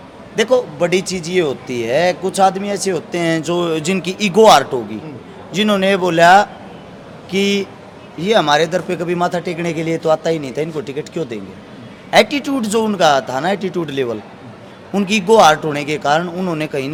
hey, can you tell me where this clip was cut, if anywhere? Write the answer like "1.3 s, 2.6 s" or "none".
none